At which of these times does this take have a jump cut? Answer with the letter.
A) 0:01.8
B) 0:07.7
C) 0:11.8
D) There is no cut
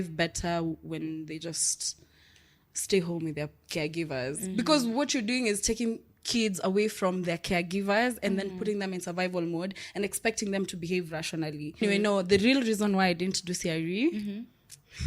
C